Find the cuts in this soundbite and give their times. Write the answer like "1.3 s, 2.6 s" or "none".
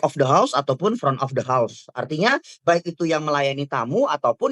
none